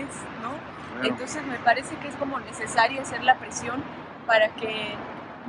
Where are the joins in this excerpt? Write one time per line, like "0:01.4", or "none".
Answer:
none